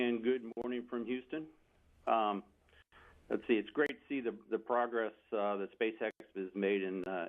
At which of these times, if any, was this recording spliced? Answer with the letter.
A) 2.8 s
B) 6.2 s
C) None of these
B